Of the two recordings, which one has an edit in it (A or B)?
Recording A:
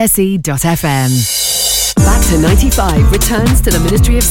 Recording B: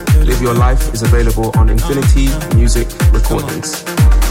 A